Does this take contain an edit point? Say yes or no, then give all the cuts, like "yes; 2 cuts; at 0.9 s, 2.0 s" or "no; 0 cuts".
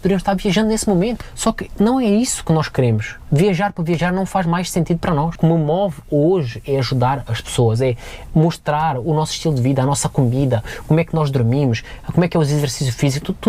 yes; 2 cuts; at 1.2 s, 5.3 s